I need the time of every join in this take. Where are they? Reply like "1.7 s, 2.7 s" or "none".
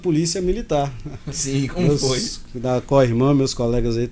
none